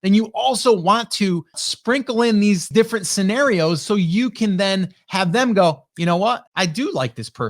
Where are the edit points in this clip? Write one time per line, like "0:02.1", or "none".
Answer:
0:01.7
0:02.7
0:06.5